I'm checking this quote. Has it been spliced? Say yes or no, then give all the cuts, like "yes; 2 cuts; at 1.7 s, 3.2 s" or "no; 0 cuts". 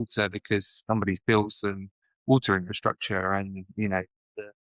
no; 0 cuts